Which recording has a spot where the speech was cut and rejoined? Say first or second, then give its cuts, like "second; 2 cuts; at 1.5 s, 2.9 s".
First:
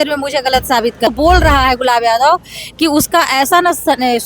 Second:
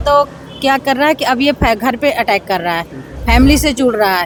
first; 1 cut; at 1.1 s